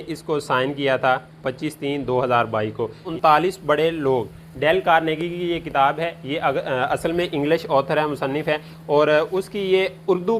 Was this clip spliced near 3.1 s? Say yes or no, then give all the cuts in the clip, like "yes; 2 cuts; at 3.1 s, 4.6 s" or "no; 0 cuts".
yes; 1 cut; at 3.1 s